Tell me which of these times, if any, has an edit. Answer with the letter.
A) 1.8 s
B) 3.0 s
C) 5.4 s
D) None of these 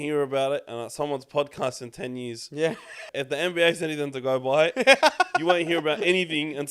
B